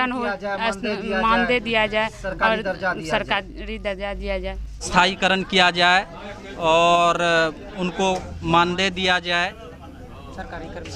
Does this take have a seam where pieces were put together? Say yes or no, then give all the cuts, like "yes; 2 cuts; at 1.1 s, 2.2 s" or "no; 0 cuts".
yes; 1 cut; at 4.9 s